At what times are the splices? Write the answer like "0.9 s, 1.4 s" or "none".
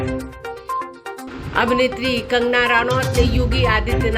0.9 s